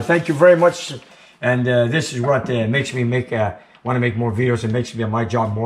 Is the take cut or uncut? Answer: cut